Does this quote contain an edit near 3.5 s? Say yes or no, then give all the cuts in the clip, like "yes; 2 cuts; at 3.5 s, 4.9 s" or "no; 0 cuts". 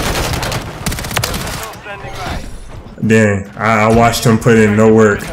no; 0 cuts